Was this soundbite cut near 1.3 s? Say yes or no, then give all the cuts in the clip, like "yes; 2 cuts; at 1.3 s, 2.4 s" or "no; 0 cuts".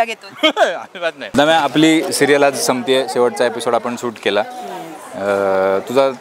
yes; 1 cut; at 1.3 s